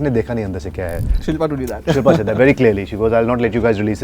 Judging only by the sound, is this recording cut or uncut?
cut